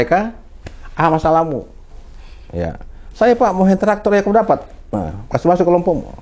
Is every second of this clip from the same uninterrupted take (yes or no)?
yes